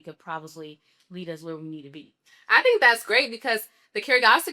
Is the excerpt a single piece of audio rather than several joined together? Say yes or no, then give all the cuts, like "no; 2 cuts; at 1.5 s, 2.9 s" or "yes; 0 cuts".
yes; 0 cuts